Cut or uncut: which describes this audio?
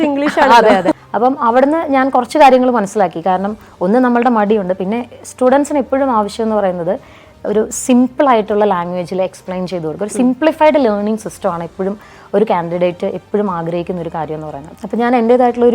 cut